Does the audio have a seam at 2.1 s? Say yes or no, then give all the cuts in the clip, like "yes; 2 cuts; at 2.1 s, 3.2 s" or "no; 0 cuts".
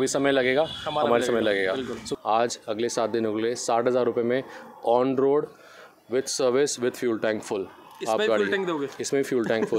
yes; 1 cut; at 2.1 s